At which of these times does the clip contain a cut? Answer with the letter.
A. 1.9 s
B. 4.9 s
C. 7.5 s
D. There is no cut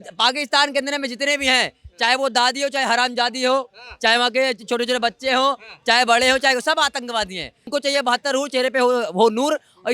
C